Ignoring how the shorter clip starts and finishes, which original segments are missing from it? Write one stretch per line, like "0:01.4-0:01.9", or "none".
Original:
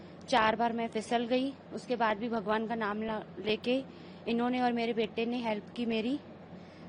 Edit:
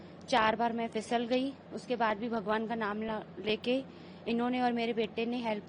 none